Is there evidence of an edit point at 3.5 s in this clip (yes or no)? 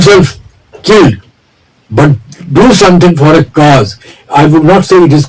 no